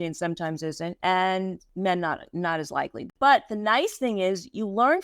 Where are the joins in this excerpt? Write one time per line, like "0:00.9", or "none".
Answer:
0:00.9
0:01.6
0:03.0